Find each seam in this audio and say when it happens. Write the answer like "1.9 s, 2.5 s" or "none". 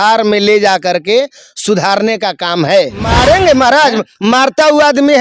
3.1 s